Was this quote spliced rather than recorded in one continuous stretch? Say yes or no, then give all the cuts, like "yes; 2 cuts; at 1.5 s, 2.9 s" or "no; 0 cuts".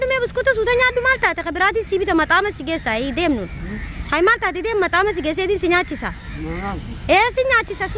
no; 0 cuts